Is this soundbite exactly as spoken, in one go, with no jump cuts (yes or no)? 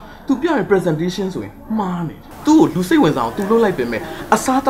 no